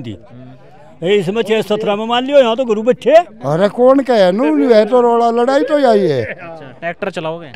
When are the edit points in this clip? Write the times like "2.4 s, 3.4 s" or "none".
3.4 s